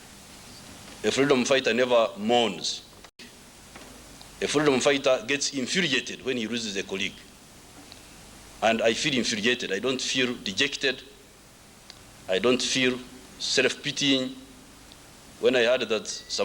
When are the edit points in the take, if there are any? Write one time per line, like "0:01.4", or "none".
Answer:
0:03.1

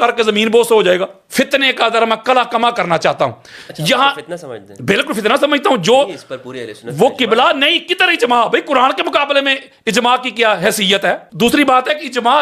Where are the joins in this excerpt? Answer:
0:01.2
0:11.3

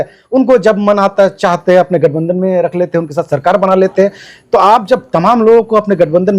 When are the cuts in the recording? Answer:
none

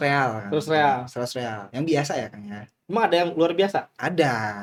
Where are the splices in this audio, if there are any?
none

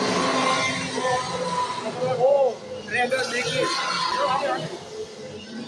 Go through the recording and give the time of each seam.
0:04.1

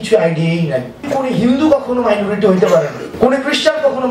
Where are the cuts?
0:01.1
0:03.1

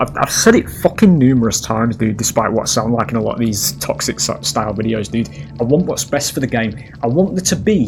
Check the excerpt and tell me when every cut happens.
none

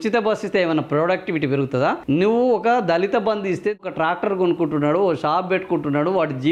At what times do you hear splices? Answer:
0:02.0
0:03.8

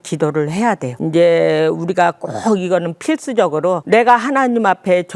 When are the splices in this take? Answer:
0:00.9
0:03.8

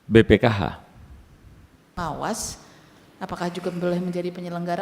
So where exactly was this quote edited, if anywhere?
0:01.9

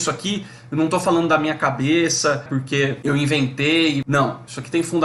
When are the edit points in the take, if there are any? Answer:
0:02.5
0:04.0

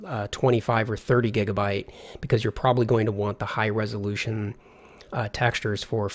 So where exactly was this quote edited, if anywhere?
0:03.6

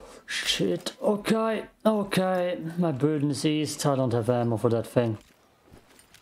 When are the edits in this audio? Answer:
none

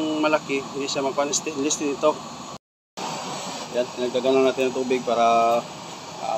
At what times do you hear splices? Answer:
0:02.5

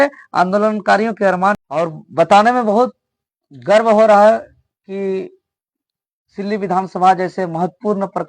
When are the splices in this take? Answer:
0:01.6

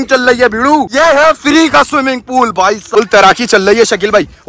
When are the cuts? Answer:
0:02.8

